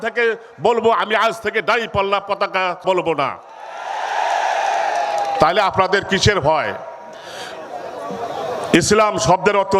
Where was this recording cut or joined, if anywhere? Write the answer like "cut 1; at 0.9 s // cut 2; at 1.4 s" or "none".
cut 1; at 2.8 s

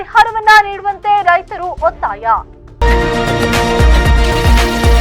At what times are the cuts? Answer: cut 1; at 2.6 s

